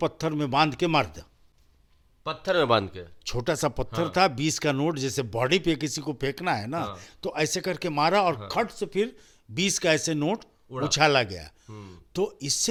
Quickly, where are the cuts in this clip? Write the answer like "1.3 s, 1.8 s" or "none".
none